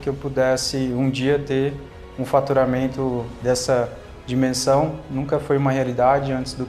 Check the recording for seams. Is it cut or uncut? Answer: cut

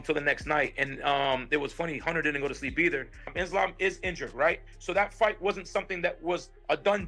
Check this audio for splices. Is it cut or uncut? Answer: cut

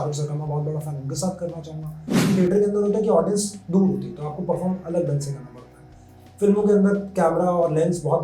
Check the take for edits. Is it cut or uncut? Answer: cut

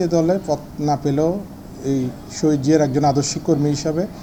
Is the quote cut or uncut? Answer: uncut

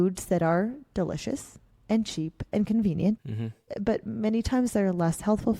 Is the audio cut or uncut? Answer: cut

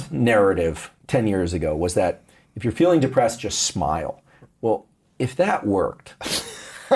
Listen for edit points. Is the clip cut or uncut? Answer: cut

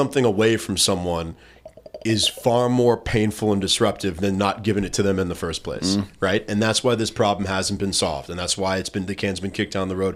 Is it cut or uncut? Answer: uncut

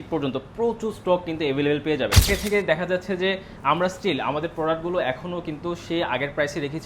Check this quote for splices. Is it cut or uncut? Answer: cut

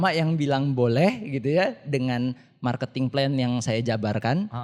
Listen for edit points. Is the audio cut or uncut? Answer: uncut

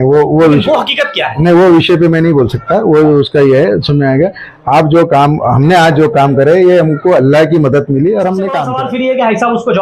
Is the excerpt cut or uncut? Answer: cut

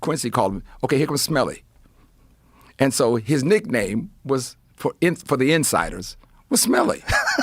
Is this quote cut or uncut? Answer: uncut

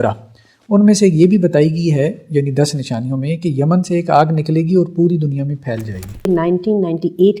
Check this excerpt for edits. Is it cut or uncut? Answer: cut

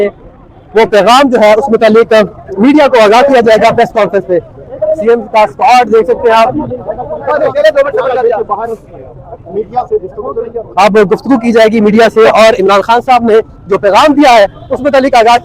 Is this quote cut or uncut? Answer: uncut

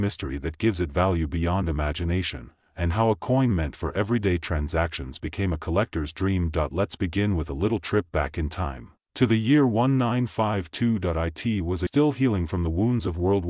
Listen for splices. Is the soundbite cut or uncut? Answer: cut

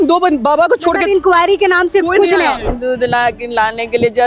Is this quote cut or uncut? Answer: cut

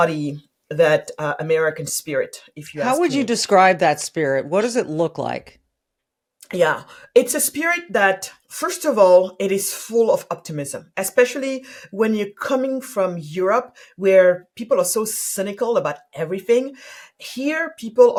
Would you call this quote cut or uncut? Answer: uncut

